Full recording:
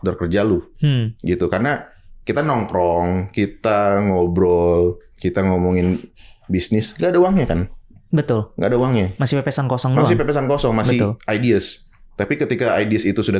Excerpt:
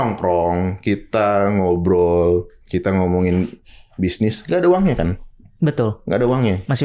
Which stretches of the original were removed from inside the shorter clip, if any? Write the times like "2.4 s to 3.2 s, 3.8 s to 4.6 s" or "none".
none